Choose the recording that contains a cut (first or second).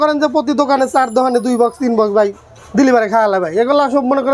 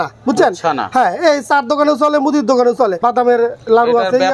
second